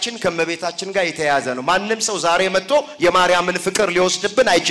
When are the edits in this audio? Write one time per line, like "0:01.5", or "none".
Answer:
none